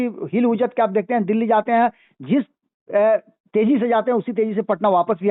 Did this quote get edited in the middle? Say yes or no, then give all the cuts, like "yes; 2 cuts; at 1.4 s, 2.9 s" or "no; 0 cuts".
no; 0 cuts